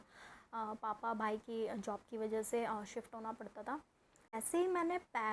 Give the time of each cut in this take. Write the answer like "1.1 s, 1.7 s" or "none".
4.4 s